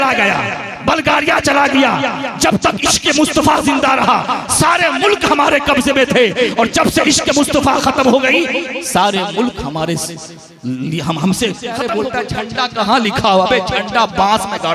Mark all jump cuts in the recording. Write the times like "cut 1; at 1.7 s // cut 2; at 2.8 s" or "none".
cut 1; at 11.9 s